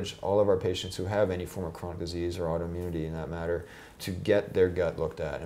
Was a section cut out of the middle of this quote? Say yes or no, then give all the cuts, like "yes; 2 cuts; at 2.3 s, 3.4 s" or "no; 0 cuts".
yes; 1 cut; at 4.0 s